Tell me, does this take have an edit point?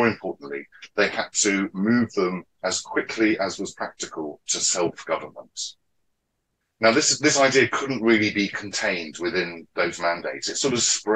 no; 0 cuts

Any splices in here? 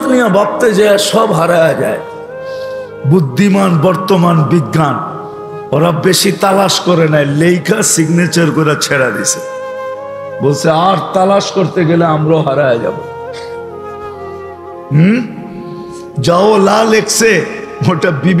yes; 2 cuts; at 13.4 s, 14.9 s

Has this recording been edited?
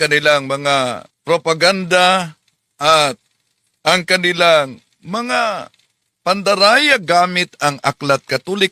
yes; 1 cut; at 1.1 s

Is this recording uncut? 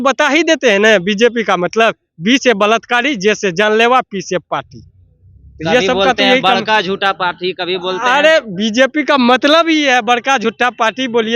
yes; 0 cuts

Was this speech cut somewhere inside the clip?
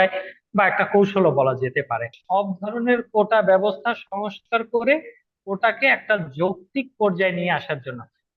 yes; 1 cut; at 2.1 s

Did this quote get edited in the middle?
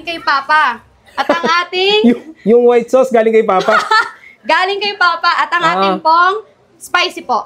no; 0 cuts

